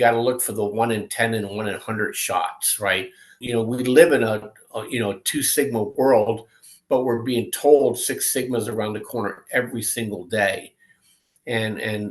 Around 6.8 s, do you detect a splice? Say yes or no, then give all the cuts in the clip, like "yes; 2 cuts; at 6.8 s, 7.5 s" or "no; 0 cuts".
no; 1 cut; at 3.4 s